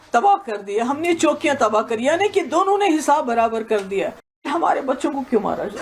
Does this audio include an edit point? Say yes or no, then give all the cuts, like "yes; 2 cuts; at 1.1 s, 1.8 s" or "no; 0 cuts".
yes; 1 cut; at 4.5 s